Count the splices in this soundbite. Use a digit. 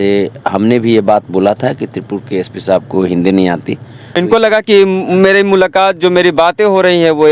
1